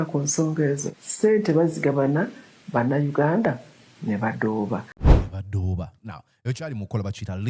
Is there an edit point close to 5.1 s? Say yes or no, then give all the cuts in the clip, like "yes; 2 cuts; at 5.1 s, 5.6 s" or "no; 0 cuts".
yes; 1 cut; at 5.1 s